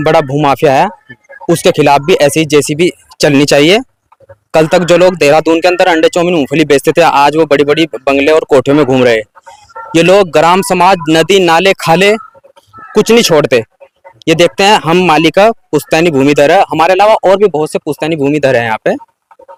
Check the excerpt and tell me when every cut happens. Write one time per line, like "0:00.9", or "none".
none